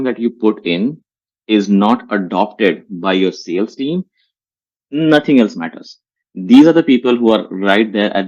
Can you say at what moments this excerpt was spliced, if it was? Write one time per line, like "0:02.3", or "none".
none